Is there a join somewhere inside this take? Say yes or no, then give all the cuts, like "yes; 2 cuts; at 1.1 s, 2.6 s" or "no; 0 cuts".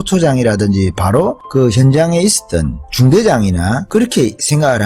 yes; 2 cuts; at 2.9 s, 4.1 s